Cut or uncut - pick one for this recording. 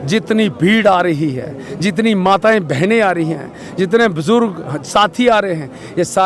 uncut